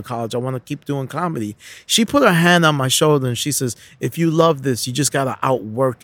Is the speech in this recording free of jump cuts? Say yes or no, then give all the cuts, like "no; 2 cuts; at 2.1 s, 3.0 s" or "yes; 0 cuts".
yes; 0 cuts